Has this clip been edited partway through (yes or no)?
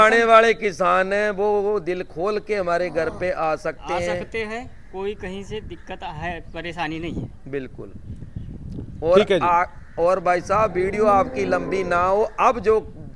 no